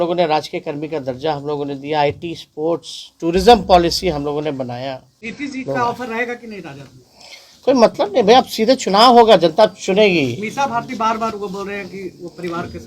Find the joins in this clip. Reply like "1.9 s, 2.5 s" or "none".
5.1 s